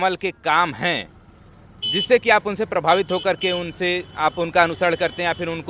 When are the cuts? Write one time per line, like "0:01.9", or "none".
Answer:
none